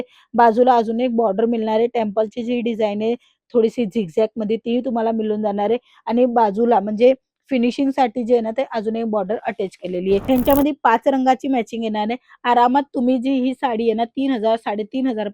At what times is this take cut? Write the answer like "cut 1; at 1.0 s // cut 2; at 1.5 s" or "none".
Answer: cut 1; at 10.2 s